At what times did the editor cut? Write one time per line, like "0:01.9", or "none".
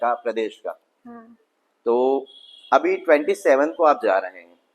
none